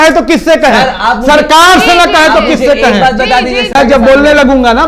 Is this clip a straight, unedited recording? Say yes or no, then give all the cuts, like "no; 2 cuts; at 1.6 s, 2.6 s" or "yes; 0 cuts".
no; 1 cut; at 3.7 s